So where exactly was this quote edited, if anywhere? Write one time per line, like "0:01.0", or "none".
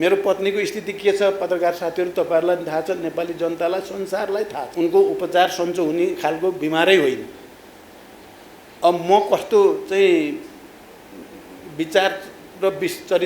0:04.7